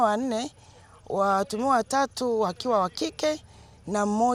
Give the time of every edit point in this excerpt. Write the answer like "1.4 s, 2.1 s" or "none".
none